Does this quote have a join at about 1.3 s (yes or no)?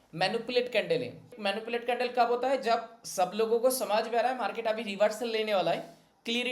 yes